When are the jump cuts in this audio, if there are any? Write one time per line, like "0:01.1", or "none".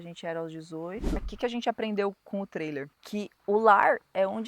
0:01.2
0:03.4